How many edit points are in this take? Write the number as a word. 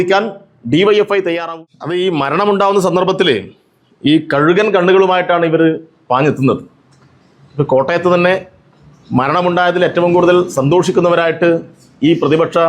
one